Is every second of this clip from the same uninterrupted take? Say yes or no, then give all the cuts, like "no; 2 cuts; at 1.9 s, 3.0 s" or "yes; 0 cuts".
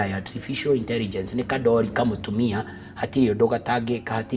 yes; 0 cuts